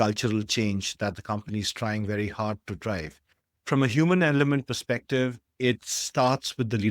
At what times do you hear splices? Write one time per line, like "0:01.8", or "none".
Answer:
0:03.5